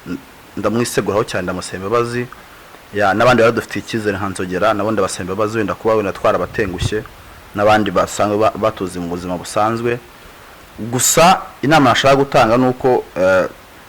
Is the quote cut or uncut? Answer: uncut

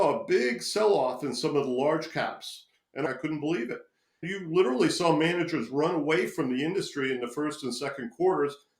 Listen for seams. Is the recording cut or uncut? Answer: cut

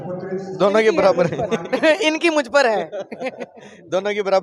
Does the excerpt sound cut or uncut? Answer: uncut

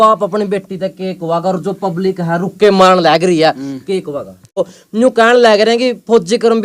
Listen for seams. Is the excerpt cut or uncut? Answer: cut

